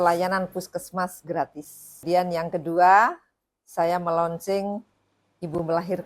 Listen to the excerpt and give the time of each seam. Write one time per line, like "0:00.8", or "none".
0:02.0